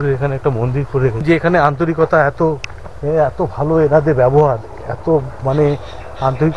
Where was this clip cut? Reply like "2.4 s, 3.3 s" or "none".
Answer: 1.2 s